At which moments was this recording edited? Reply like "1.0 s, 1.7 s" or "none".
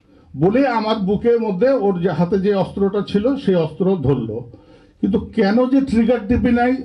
none